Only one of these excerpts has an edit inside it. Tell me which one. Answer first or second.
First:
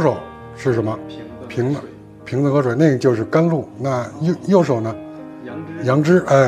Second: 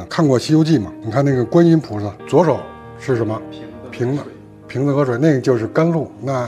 second